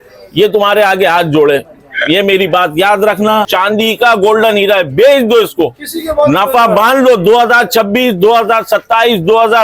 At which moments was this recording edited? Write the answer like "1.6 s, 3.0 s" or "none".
3.5 s